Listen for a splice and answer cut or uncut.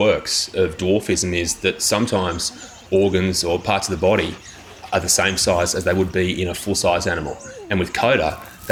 uncut